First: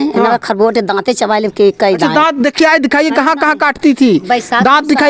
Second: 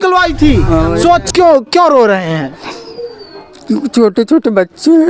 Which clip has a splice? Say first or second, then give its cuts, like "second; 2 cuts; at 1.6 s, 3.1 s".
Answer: second; 1 cut; at 1.2 s